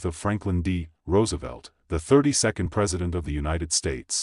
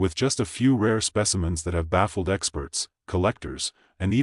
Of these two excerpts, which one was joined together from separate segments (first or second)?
first